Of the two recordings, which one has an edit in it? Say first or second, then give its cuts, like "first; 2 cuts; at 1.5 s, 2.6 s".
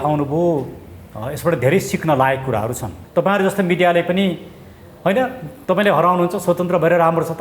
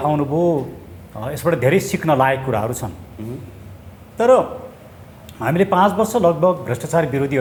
first; 1 cut; at 2.9 s